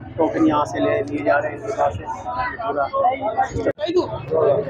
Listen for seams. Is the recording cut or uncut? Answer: uncut